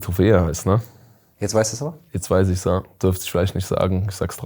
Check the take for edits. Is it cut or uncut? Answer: uncut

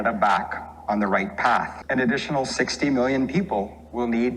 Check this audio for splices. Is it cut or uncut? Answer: cut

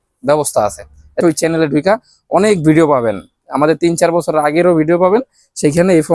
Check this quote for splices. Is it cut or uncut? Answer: cut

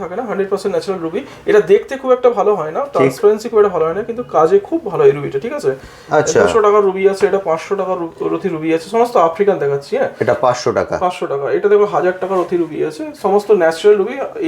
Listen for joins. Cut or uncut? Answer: uncut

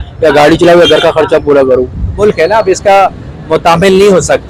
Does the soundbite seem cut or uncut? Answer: uncut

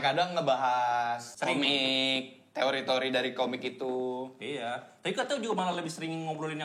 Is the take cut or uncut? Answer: cut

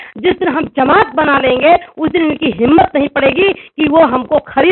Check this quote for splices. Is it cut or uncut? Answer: uncut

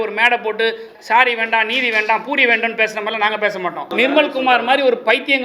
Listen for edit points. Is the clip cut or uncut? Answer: cut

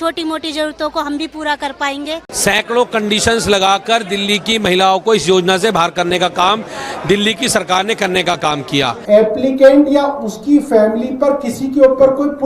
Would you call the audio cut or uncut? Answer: cut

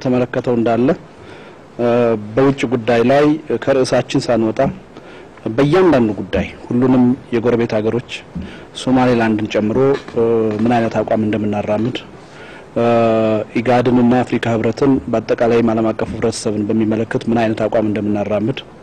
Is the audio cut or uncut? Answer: cut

